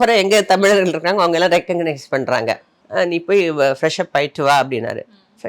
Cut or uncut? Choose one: cut